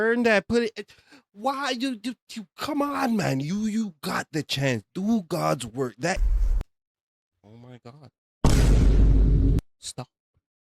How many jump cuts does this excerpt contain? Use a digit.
1